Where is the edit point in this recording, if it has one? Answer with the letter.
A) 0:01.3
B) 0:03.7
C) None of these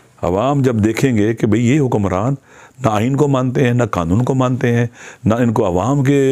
C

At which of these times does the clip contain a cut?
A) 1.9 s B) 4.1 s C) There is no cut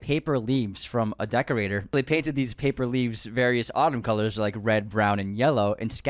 A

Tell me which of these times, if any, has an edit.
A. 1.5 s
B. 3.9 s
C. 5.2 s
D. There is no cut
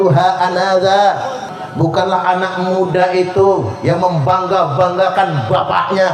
A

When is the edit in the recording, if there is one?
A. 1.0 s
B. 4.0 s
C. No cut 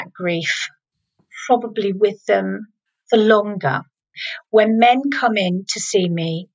B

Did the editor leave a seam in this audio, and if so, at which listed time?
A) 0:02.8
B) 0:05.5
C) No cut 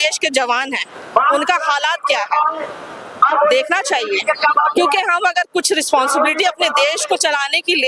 C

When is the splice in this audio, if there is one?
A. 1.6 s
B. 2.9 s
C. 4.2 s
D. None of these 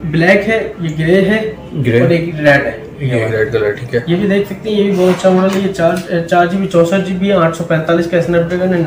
D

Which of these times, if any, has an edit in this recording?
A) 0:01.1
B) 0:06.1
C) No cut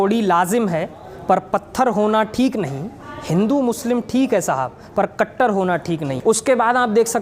B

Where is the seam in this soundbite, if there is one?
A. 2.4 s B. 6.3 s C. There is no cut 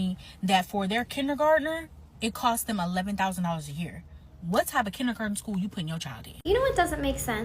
B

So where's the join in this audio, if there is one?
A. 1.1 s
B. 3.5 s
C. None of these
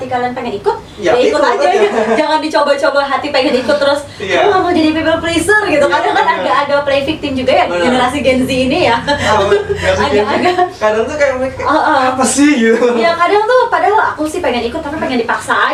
C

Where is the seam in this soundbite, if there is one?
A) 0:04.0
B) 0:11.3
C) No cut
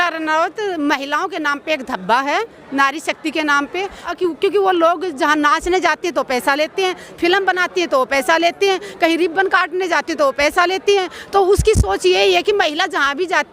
A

